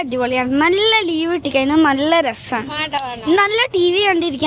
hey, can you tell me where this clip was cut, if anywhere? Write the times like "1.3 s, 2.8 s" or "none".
none